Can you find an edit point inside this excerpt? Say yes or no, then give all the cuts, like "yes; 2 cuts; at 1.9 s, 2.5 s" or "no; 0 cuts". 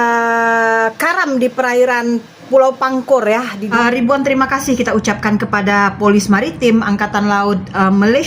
yes; 1 cut; at 3.6 s